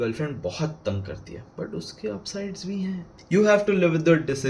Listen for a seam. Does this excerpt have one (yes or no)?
yes